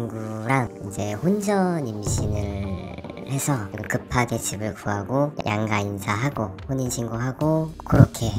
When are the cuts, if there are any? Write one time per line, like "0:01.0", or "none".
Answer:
none

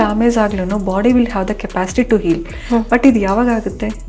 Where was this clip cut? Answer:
none

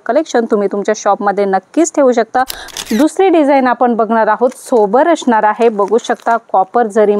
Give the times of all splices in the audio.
0:02.7

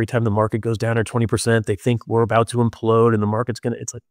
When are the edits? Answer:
none

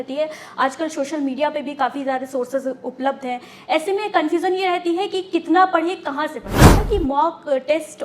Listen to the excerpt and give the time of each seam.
0:06.7

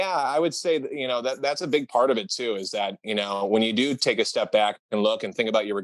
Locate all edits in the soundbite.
none

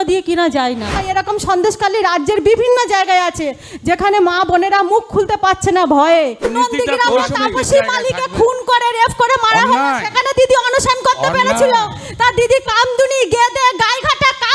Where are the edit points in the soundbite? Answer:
0:01.0
0:06.5

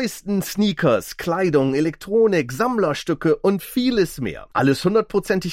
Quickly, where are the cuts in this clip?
none

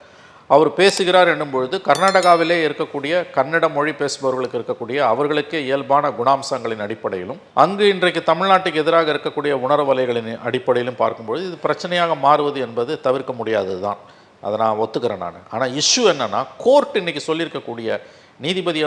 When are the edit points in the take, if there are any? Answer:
none

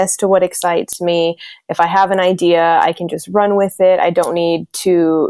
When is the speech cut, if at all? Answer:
none

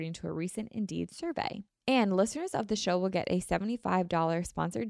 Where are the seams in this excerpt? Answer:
0:01.7

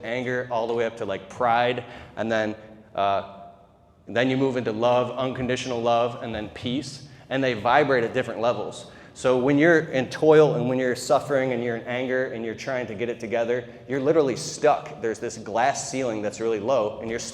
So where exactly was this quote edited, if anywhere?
none

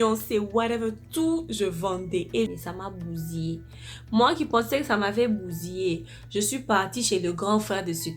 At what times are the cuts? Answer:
0:02.5

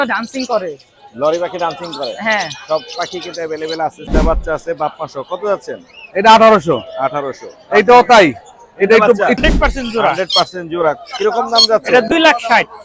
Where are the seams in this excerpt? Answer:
0:04.1
0:09.4

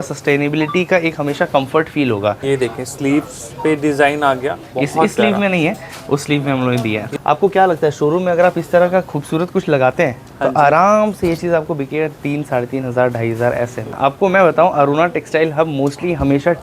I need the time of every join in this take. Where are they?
0:02.4
0:07.0
0:13.9

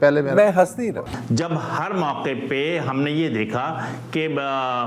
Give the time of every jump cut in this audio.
none

